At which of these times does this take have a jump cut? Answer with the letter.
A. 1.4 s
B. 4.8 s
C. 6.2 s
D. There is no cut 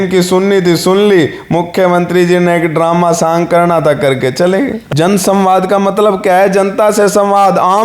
B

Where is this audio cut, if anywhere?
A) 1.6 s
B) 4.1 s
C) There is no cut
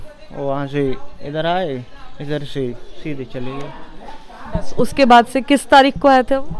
C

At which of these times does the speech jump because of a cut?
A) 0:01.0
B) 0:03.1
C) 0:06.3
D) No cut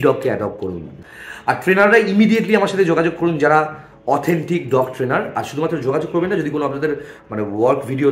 A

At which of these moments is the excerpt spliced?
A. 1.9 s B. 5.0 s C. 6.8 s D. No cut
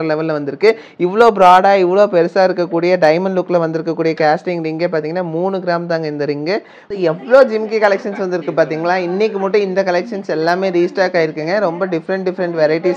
C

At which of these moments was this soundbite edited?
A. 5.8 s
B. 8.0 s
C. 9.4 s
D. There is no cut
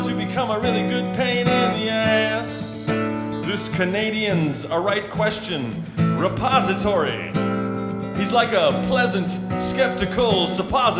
C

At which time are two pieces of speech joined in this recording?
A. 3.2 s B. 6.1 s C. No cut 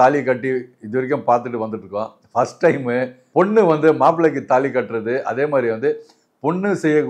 C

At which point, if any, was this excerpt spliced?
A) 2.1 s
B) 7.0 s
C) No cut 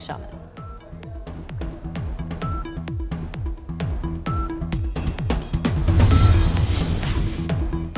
B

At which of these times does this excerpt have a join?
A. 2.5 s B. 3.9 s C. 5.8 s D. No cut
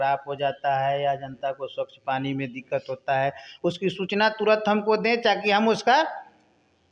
D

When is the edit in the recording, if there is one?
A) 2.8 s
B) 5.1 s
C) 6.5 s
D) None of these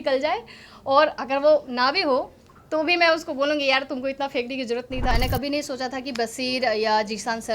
B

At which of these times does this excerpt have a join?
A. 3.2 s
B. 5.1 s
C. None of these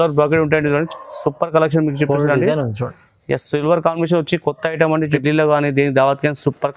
B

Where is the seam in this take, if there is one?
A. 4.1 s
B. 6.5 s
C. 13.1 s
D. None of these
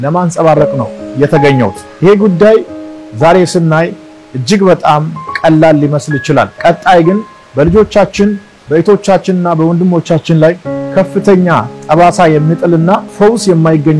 C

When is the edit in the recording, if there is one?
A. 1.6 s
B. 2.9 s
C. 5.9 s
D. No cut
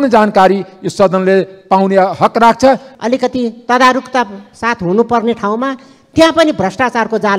B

